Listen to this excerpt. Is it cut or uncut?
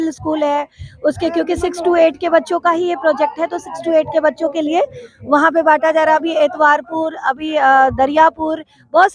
uncut